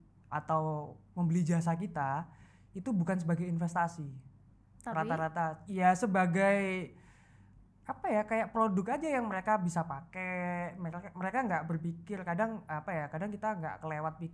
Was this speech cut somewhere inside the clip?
no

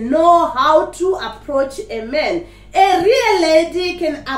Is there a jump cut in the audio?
no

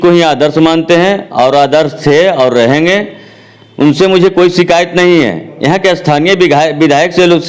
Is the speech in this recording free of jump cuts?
yes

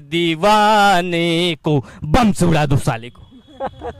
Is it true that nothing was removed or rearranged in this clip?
yes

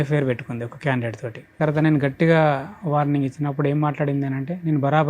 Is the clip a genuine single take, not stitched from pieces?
no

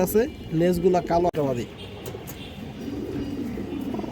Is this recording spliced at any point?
yes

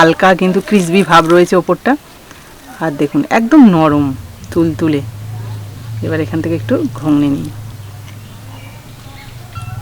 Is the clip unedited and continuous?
yes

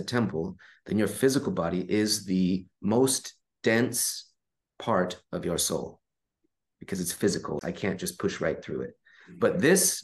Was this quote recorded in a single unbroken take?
no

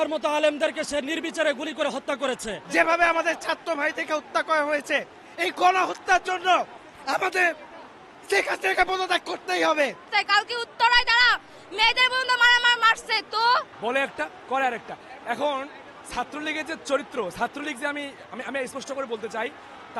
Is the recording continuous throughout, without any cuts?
no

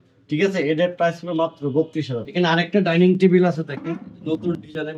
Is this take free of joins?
no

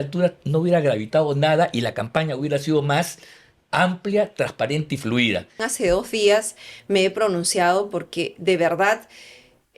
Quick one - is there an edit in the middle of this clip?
yes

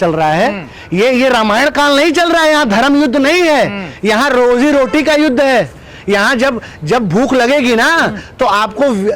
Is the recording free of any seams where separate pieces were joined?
yes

